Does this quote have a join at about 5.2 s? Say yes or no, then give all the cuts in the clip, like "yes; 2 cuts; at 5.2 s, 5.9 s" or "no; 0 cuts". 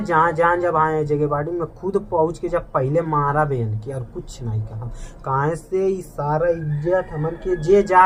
no; 0 cuts